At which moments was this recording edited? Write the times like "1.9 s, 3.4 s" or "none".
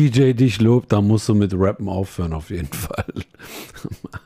none